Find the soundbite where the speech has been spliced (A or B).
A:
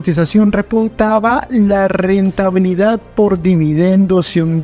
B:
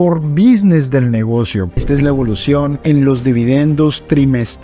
B